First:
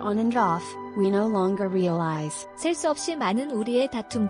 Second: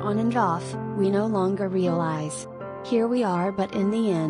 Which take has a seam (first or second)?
second